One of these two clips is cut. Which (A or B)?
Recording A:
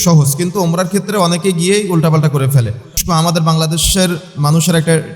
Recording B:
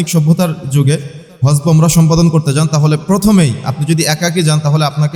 A